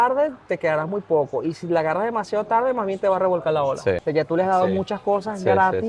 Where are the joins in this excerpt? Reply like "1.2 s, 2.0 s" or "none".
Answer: 4.0 s